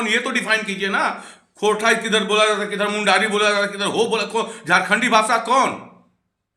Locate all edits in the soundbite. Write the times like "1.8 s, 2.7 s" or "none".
none